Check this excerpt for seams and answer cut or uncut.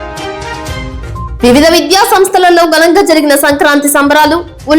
cut